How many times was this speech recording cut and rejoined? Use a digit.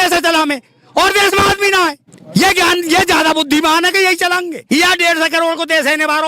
2